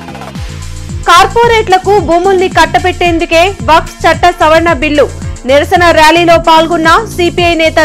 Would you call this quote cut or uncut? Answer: cut